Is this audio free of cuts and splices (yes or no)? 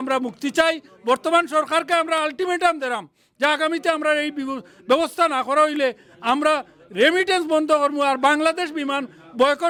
yes